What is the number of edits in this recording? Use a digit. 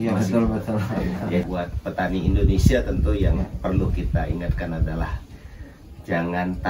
1